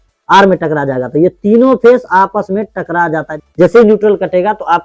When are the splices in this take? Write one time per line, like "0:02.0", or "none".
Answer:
none

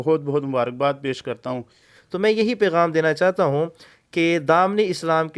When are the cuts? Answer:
0:01.9

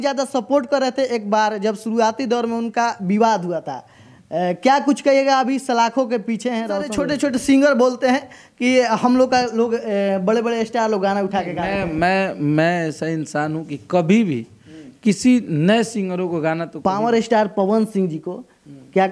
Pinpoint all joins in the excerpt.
0:07.0
0:17.0

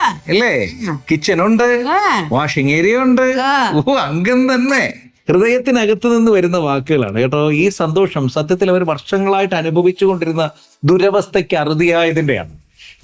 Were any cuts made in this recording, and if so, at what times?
none

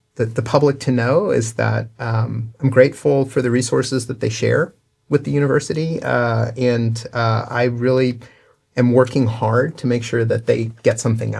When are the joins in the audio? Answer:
none

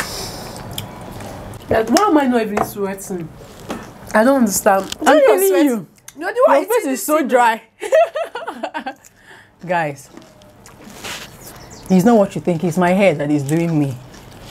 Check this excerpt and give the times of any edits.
0:01.5

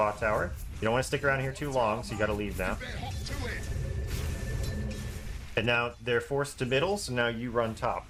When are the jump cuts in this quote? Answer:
none

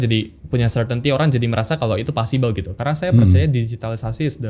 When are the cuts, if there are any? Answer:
0:02.7

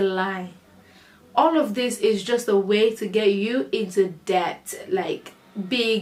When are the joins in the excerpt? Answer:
none

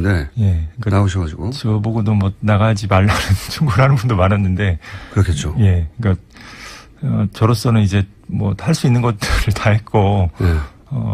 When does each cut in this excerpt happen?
none

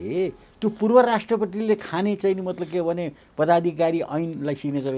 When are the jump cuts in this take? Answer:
none

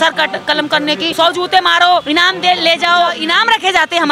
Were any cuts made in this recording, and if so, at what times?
0:01.1
0:02.1
0:03.2

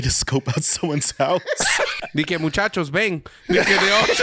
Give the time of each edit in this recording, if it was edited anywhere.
0:02.0

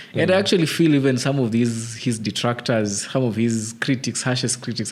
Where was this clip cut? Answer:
none

